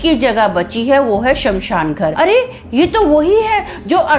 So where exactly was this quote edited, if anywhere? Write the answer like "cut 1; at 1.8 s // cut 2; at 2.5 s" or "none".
cut 1; at 2.1 s